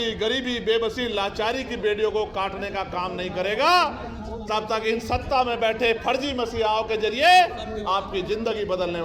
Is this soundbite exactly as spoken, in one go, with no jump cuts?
yes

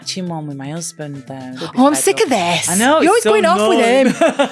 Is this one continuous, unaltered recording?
no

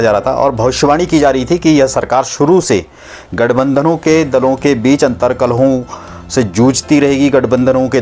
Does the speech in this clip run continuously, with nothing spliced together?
yes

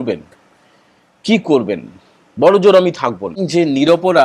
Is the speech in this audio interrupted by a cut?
yes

